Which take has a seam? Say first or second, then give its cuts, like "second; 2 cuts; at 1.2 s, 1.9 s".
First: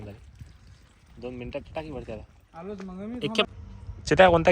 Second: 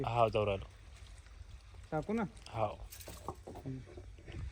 first; 1 cut; at 3.5 s